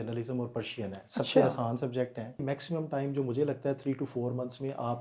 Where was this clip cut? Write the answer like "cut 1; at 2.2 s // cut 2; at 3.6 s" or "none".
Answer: cut 1; at 2.4 s